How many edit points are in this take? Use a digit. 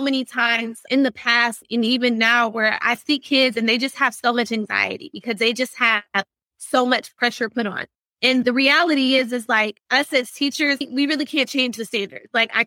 2